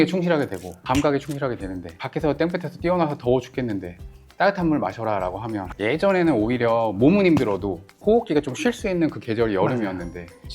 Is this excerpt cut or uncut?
cut